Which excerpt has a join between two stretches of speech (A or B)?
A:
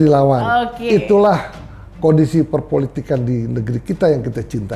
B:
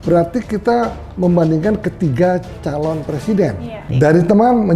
B